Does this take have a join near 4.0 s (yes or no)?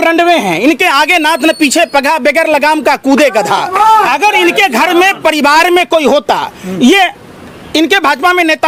no